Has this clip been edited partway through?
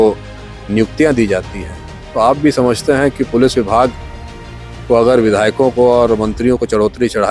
no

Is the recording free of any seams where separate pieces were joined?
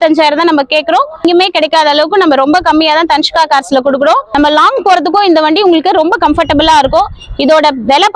no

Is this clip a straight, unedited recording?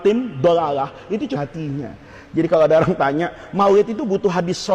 no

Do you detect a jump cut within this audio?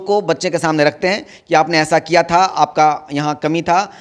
no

